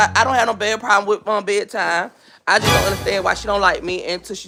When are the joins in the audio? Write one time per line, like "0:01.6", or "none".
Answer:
none